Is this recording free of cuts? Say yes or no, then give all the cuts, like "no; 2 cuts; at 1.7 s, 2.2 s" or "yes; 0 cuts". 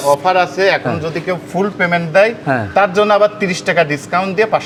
yes; 0 cuts